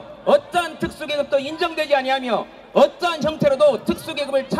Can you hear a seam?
no; 0 cuts

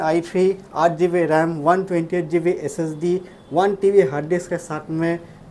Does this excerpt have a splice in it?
no; 0 cuts

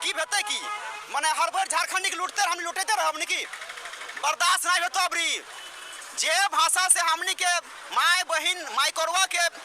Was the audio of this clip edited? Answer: no; 0 cuts

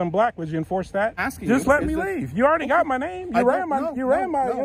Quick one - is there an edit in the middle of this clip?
yes; 1 cut; at 1.2 s

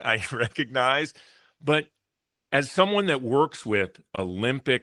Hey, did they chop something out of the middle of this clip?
no; 0 cuts

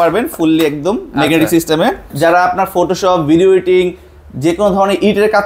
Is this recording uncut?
no; 1 cut; at 2.1 s

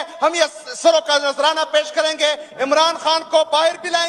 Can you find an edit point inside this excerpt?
no; 0 cuts

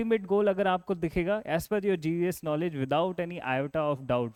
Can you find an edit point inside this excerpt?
no; 0 cuts

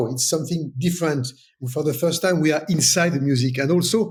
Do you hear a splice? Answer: no; 0 cuts

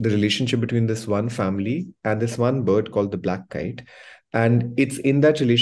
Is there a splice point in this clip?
no; 0 cuts

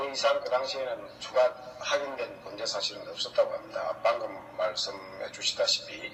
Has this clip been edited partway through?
no; 0 cuts

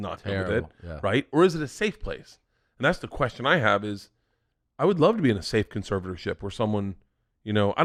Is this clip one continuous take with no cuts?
yes; 0 cuts

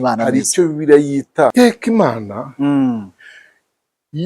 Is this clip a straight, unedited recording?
no; 1 cut; at 1.5 s

